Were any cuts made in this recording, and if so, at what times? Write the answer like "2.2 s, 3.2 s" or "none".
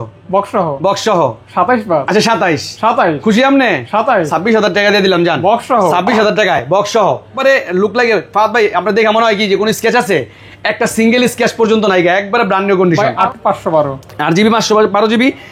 7.3 s, 13.2 s